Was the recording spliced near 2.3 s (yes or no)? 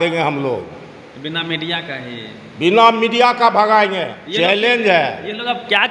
no